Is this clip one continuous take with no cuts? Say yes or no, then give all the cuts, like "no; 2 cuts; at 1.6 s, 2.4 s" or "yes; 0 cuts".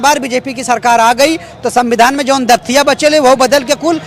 yes; 0 cuts